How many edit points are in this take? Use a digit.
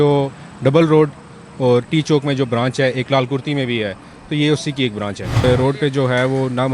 1